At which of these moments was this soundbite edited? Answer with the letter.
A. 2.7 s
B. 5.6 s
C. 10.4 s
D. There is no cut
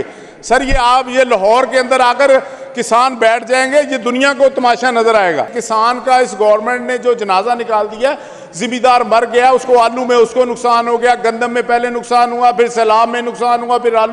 B